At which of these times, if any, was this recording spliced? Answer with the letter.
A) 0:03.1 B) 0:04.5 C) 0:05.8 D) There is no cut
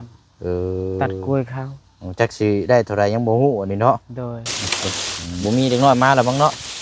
B